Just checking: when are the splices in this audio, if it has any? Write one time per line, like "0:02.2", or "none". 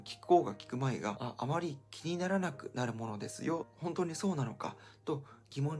0:01.2